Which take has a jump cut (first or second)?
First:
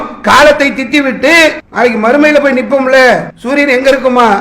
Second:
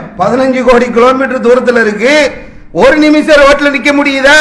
first